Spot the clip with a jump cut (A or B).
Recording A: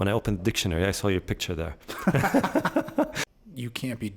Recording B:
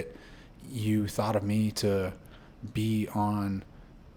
A